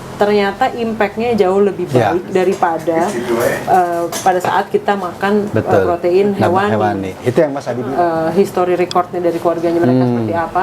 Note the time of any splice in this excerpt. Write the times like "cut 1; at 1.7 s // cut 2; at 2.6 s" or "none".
cut 1; at 7.8 s